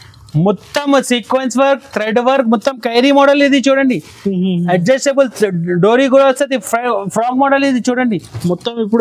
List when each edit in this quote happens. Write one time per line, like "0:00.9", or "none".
none

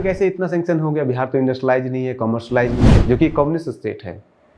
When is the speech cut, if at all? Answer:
0:02.9

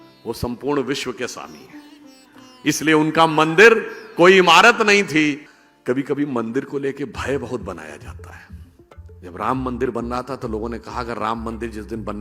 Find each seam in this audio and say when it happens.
0:05.5

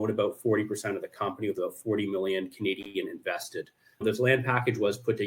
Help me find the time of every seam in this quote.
0:04.0

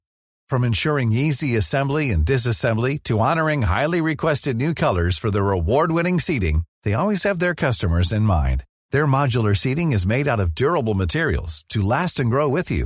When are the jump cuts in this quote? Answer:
none

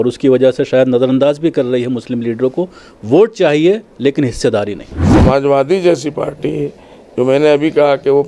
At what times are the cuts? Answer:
0:05.1

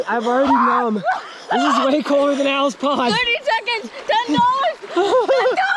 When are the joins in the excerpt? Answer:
0:04.8

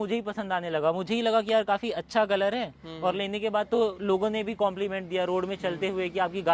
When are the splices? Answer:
none

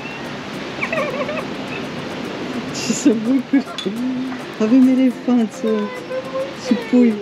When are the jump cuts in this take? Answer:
none

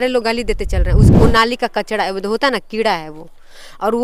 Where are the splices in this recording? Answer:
0:01.1

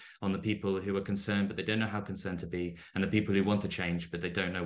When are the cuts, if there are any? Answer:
none

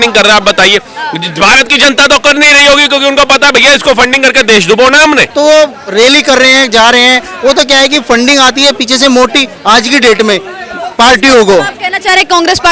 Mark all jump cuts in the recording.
0:05.3

